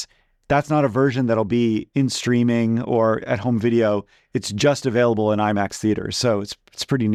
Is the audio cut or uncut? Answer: uncut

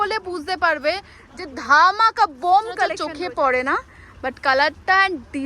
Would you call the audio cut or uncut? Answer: cut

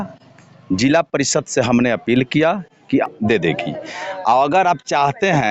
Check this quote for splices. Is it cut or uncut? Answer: cut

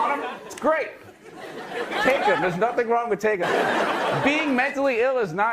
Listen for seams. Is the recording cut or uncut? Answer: cut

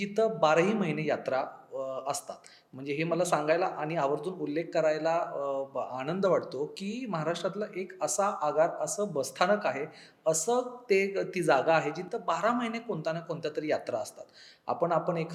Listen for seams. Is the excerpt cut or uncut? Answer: uncut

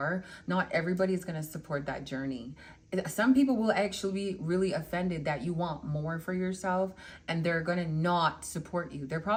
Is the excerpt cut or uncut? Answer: uncut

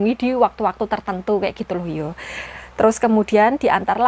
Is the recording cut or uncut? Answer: uncut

